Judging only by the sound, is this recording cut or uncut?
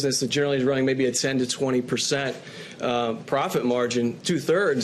uncut